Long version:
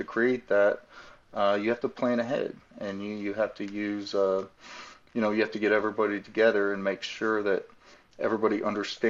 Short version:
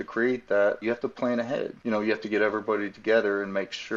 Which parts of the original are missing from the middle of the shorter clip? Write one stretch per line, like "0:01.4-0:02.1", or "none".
0:01.2-0:04.5